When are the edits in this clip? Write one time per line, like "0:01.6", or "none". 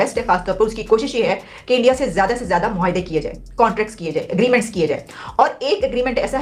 none